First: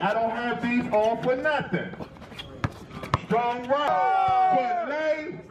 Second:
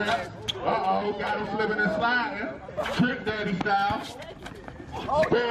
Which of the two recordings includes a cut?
first; 1 cut; at 3.9 s

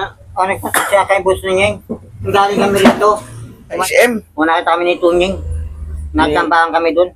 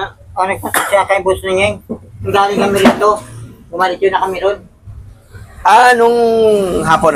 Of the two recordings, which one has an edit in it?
first; 1 cut; at 3.8 s

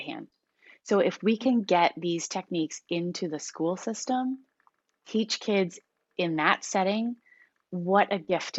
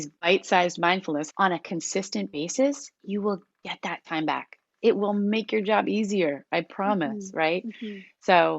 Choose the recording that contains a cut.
second; 1 cut; at 1.3 s

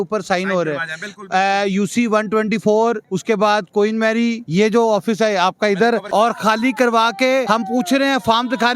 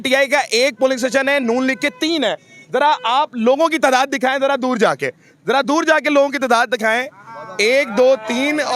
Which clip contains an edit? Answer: first; 4 cuts; at 3.1 s, 4.4 s, 6.0 s, 7.5 s

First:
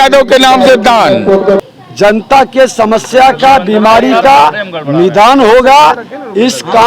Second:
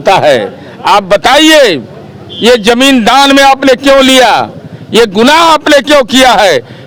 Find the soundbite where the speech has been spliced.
first; 1 cut; at 1.6 s

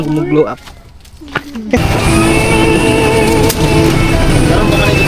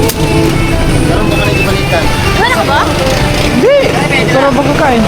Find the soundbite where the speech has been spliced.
first; 1 cut; at 1.8 s

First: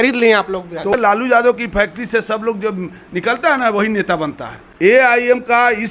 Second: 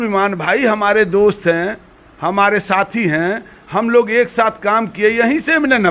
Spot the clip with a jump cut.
first; 2 cuts; at 0.9 s, 4.6 s

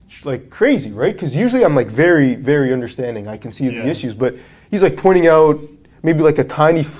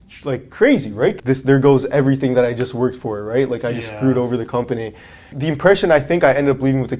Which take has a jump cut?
second; 2 cuts; at 1.2 s, 5.3 s

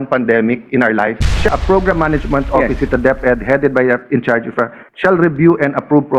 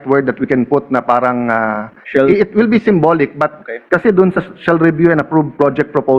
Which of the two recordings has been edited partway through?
first; 1 cut; at 1.5 s

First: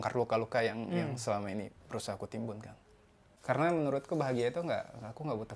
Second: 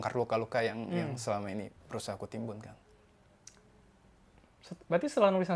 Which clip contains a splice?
first; 1 cut; at 3.4 s

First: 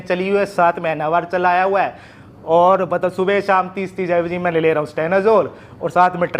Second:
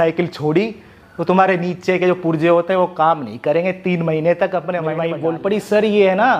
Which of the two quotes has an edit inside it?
second; 1 cut; at 5.1 s

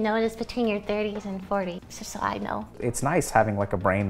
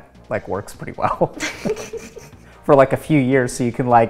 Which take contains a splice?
first; 1 cut; at 2.7 s

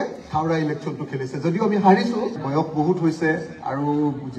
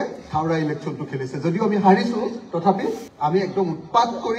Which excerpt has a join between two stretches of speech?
first; 1 cut; at 2.4 s

